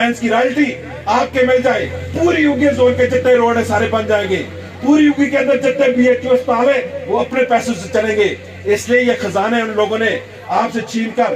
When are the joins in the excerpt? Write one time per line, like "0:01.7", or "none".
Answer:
none